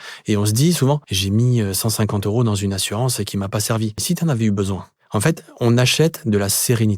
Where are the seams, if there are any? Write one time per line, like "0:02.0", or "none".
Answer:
0:01.1
0:04.0
0:04.9